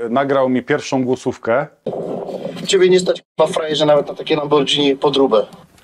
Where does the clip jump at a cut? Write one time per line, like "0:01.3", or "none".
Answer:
none